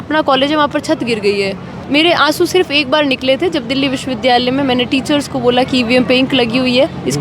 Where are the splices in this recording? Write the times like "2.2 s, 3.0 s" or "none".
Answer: 1.8 s